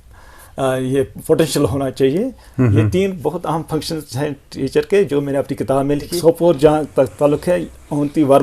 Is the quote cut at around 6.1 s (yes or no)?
yes